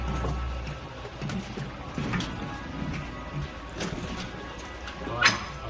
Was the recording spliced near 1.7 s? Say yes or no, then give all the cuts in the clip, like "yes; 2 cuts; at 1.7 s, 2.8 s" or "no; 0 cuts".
no; 0 cuts